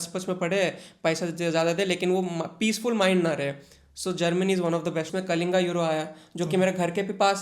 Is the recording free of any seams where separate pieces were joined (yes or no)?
no